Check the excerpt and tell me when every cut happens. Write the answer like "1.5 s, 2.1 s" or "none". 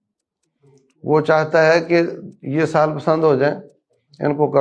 none